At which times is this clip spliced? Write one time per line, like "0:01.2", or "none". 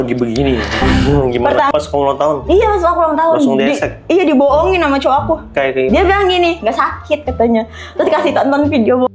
0:01.7
0:05.5